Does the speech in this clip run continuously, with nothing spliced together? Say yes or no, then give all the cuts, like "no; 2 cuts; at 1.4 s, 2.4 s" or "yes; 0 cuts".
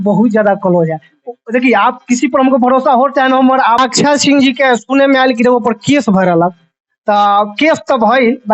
no; 1 cut; at 3.8 s